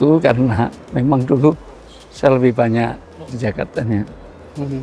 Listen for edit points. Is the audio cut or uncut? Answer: cut